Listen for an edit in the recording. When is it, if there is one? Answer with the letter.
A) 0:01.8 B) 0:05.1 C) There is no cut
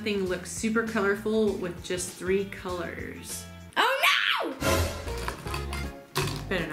B